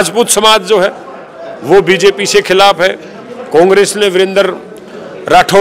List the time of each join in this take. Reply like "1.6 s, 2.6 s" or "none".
none